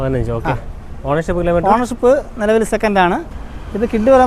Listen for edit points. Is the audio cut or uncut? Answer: cut